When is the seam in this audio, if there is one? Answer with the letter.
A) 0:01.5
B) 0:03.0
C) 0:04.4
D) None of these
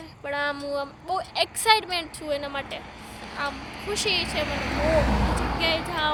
D